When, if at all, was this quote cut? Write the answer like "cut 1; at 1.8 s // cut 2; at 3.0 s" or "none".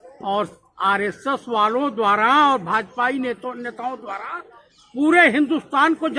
none